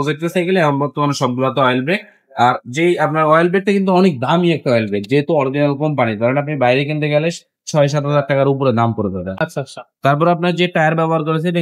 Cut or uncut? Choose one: uncut